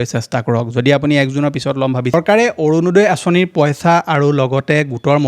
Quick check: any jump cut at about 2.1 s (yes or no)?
yes